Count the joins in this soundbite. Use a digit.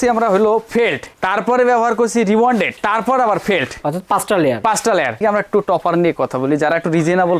1